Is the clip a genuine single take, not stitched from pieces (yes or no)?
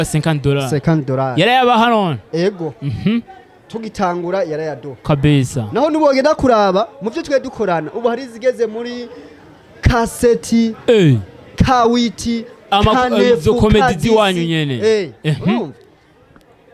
yes